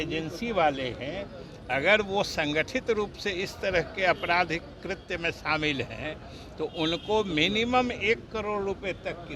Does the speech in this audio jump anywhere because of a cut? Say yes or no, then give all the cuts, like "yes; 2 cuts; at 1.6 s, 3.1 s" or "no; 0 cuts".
no; 0 cuts